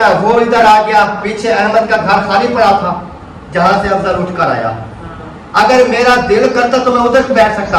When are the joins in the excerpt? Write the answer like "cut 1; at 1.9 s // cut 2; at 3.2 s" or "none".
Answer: none